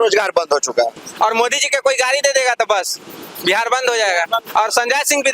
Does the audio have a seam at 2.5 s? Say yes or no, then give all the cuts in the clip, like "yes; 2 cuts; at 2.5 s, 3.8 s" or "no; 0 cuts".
no; 2 cuts; at 1.0 s, 4.5 s